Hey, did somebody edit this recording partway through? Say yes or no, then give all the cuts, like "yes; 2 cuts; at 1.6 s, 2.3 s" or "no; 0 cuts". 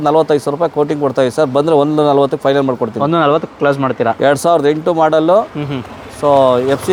no; 0 cuts